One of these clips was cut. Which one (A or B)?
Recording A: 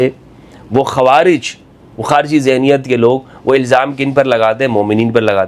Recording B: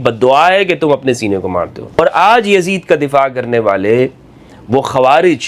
B